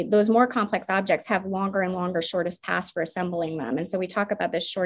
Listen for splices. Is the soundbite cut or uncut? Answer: uncut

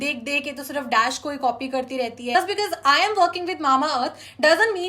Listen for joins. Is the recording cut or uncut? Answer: cut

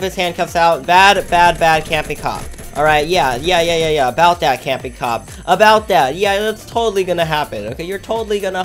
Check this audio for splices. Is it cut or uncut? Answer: uncut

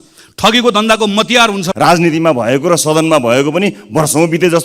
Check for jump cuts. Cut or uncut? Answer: cut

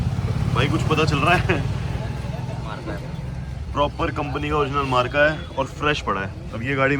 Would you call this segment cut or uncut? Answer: uncut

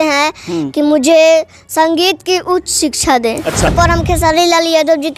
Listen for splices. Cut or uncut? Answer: cut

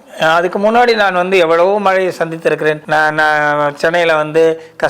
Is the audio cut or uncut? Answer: cut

